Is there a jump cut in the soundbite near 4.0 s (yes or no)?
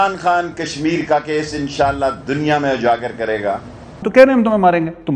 yes